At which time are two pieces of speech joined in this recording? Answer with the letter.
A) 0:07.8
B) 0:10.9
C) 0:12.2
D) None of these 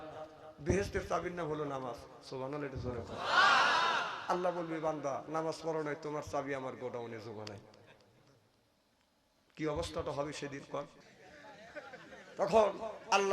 B